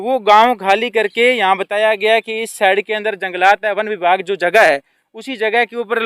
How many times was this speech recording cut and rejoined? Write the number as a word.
zero